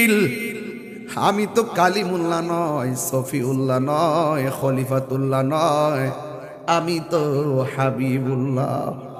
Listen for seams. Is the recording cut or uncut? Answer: uncut